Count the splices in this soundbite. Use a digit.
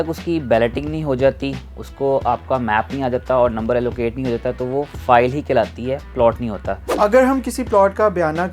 1